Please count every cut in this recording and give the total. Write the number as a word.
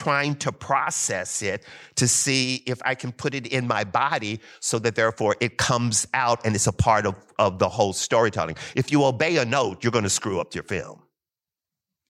zero